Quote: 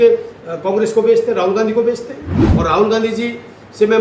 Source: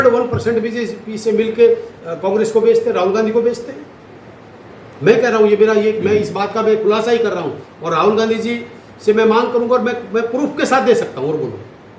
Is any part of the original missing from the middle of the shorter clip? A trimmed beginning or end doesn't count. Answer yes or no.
yes